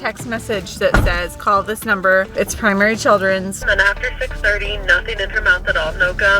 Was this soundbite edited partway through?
yes; 2 cuts; at 2.3 s, 3.7 s

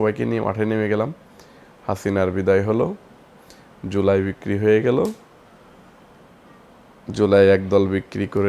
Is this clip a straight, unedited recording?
yes; 0 cuts

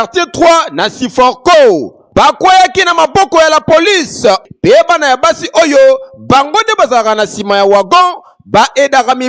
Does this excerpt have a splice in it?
yes; 1 cut; at 4.4 s

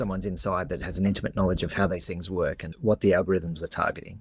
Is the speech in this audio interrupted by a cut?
yes; 1 cut; at 2.7 s

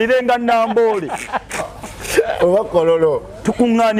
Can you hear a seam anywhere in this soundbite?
no; 0 cuts

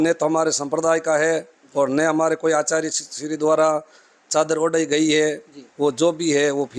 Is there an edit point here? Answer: no; 0 cuts

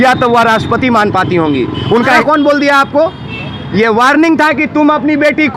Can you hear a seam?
yes; 1 cut; at 2.2 s

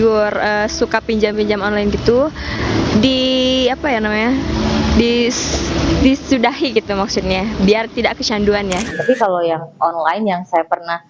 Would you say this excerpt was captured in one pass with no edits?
no; 1 cut; at 8.9 s

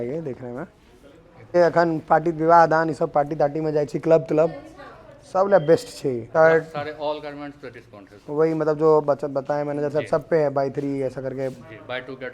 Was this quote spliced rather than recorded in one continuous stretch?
yes; 2 cuts; at 1.5 s, 6.2 s

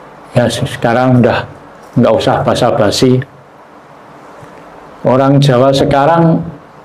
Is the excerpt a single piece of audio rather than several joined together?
yes; 0 cuts

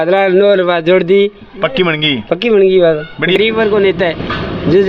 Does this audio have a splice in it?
yes; 1 cut; at 3.4 s

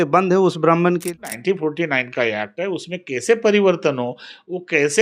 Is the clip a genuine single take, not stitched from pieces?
no; 1 cut; at 1.1 s

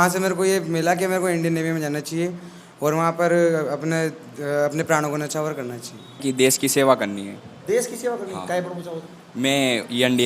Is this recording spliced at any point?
yes; 1 cut; at 6.2 s

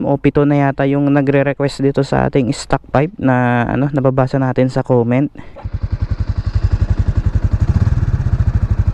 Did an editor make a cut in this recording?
yes; 1 cut; at 5.5 s

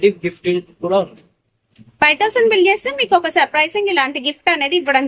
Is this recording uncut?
yes; 0 cuts

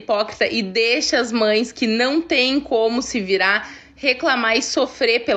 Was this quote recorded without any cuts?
yes; 0 cuts

